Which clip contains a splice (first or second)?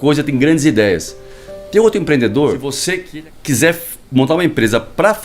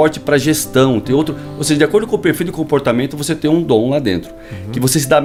first